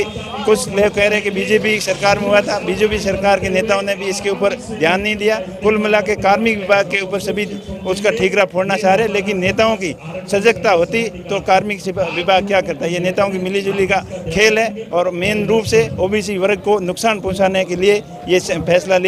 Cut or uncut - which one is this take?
uncut